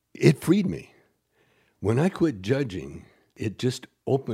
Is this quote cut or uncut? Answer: cut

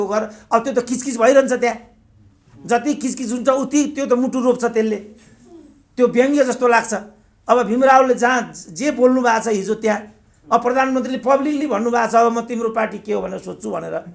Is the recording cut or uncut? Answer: uncut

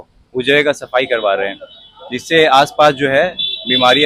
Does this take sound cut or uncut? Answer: uncut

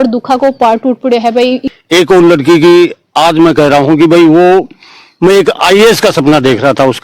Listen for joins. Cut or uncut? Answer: cut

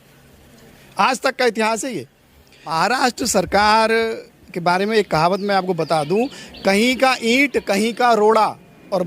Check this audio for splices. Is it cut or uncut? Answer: cut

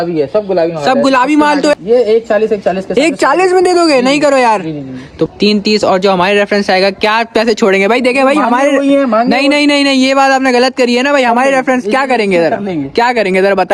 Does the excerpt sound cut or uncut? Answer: cut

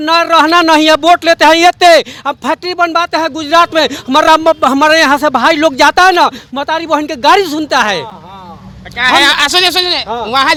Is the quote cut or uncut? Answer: uncut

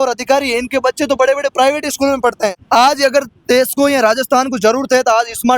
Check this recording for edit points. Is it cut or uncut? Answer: cut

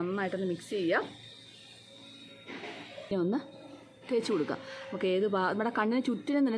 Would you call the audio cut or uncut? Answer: cut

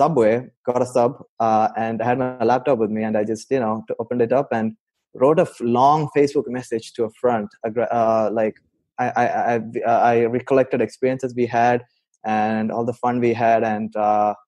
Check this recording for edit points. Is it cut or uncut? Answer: uncut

